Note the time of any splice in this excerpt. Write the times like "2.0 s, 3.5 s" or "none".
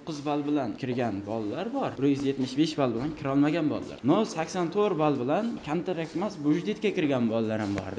0.8 s, 1.9 s, 3.9 s